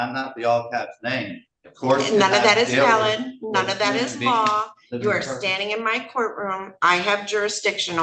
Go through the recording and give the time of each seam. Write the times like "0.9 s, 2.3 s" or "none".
none